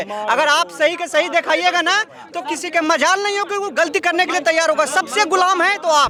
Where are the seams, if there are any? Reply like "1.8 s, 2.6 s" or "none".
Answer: none